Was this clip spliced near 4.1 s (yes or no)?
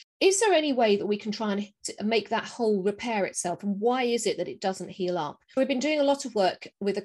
no